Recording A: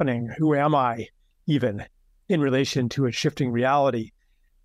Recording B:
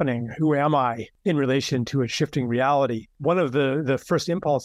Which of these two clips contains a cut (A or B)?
B